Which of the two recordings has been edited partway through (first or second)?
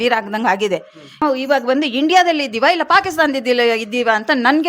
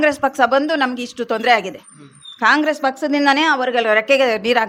first